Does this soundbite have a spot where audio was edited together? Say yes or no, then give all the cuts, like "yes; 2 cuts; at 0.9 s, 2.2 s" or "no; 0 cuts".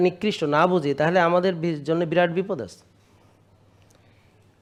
no; 0 cuts